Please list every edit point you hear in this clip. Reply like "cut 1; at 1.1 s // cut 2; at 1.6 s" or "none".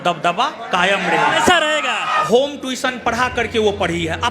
cut 1; at 2.4 s